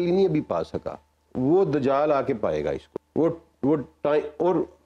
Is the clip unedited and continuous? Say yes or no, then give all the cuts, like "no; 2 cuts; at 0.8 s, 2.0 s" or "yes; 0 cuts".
yes; 0 cuts